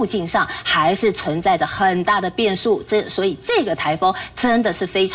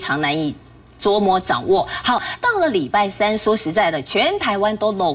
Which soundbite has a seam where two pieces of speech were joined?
second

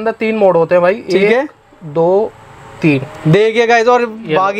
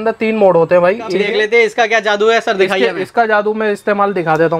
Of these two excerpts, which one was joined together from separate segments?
second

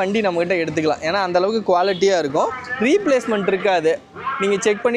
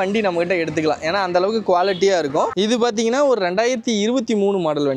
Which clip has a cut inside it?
second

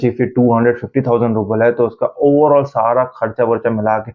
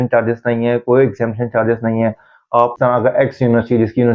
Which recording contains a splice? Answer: second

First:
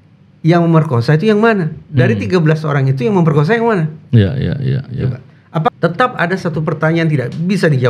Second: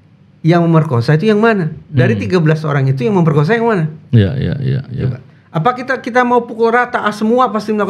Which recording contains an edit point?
first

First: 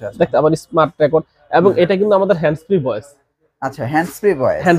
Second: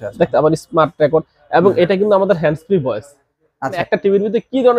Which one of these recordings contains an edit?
second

